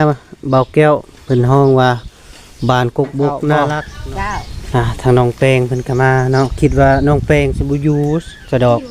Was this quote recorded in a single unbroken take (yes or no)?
no